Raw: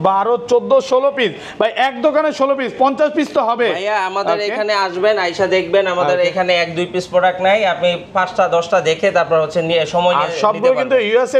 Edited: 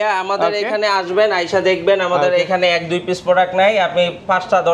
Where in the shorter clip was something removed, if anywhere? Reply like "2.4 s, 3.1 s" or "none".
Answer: none